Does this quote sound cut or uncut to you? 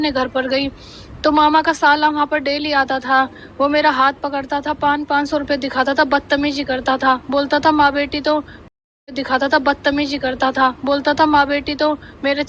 uncut